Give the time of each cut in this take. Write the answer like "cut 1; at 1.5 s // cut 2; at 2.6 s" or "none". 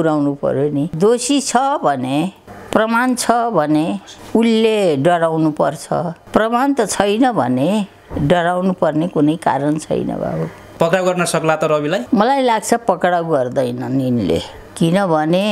cut 1; at 0.9 s // cut 2; at 10.6 s